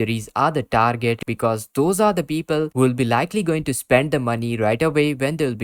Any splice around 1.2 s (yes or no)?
yes